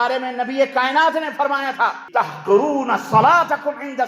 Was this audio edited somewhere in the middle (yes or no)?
yes